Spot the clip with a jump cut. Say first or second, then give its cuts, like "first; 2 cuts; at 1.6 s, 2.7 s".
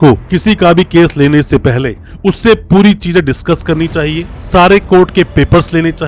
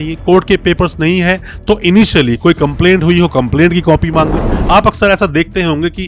second; 1 cut; at 4.4 s